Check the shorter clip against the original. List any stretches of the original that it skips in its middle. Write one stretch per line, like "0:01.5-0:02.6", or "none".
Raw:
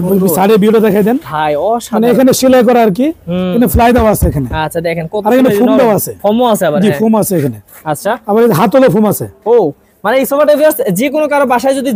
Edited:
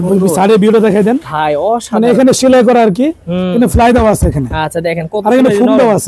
none